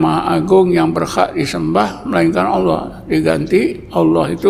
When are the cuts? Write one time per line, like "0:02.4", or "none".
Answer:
none

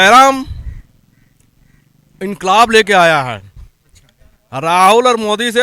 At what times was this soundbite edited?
none

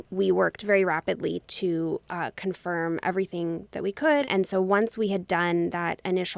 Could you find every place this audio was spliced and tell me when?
0:04.3

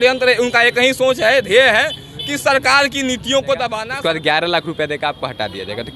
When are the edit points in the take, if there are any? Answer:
0:03.8

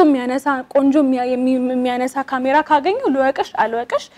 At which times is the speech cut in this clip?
none

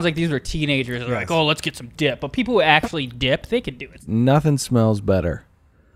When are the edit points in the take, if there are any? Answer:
0:04.0

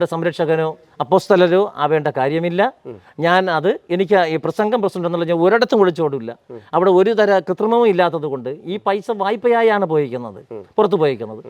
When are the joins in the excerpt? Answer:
none

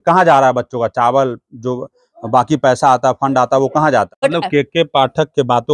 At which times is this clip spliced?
0:04.1

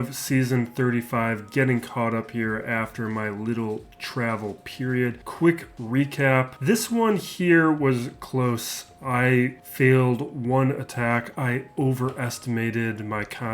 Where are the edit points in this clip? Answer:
0:05.2
0:06.5
0:09.6

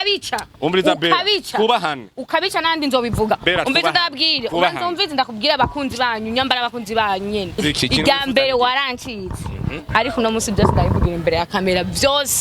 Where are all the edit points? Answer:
0:07.5

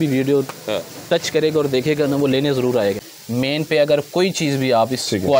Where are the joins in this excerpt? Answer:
0:03.0

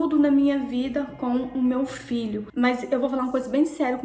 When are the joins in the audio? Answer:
0:02.4

